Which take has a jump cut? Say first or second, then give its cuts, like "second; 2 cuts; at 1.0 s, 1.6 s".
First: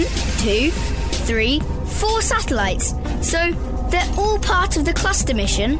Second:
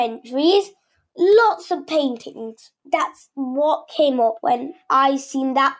second; 2 cuts; at 2.7 s, 4.4 s